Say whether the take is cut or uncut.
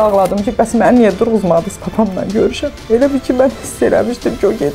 uncut